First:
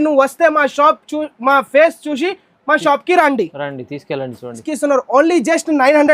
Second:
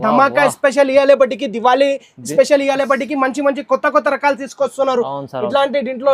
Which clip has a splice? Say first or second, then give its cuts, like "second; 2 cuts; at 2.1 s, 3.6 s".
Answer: first; 1 cut; at 4.7 s